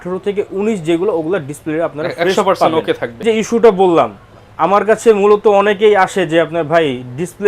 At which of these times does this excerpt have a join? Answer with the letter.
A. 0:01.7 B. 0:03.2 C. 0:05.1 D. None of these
B